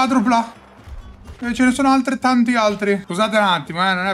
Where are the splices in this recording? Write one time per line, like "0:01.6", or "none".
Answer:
0:03.1